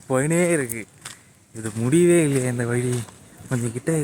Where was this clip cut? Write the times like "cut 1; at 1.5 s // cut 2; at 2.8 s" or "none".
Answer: none